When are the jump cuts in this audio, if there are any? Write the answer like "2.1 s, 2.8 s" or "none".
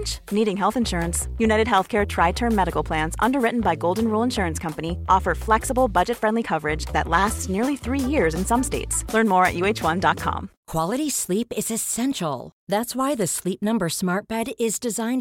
10.5 s